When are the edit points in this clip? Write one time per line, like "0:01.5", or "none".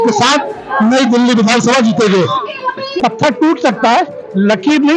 0:03.0